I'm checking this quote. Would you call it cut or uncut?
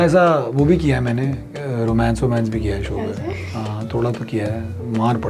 uncut